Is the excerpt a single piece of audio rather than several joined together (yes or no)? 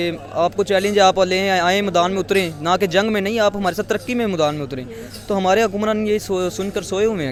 yes